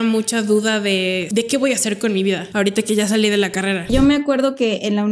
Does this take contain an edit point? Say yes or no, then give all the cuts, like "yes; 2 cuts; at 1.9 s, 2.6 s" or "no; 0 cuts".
yes; 3 cuts; at 1.2 s, 2.5 s, 3.9 s